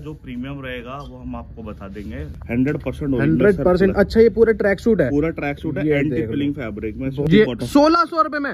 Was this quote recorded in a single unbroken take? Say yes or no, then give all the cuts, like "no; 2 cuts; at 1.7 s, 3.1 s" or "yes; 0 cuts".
no; 2 cuts; at 2.3 s, 7.3 s